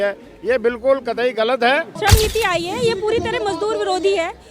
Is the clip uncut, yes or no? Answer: no